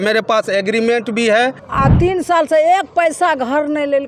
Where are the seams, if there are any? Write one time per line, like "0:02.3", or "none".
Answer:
0:01.6